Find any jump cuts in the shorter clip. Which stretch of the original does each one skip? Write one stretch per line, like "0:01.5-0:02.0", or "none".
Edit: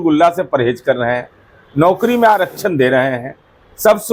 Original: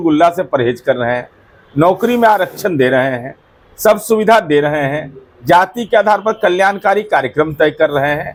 none